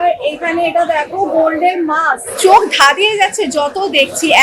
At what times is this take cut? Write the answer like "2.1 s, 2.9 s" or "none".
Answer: 2.3 s